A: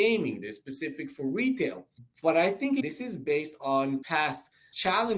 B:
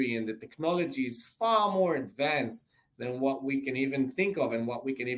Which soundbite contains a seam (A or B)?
A